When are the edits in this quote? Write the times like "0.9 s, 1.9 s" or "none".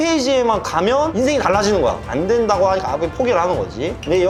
none